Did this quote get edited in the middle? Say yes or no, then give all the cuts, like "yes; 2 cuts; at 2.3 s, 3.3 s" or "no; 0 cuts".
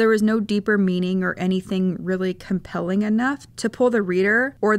yes; 1 cut; at 3.5 s